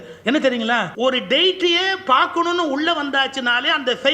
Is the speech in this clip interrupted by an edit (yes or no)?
yes